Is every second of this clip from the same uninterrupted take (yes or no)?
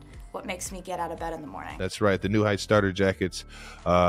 no